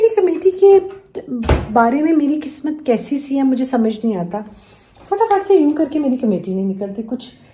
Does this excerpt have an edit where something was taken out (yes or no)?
no